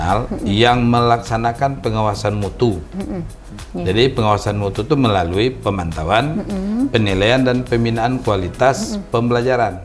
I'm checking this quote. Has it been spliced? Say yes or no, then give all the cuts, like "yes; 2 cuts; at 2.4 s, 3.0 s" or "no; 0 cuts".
no; 0 cuts